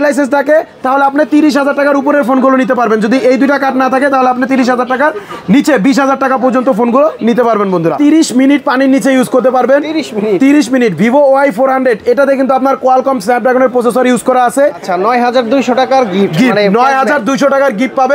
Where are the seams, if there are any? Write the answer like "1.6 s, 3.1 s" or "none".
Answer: 7.9 s, 14.8 s